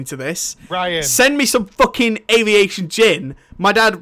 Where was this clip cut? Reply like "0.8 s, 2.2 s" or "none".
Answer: none